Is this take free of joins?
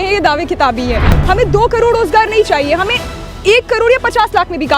no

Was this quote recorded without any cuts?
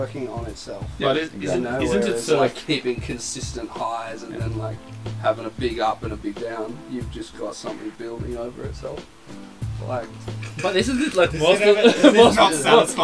yes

